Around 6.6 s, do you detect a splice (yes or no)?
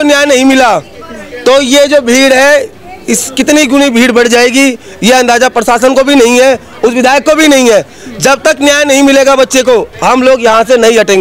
no